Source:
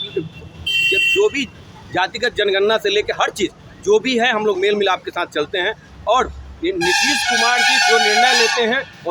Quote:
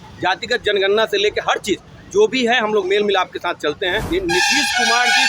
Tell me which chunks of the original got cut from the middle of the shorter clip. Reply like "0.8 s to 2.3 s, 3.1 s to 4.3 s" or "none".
5.7 s to 6.5 s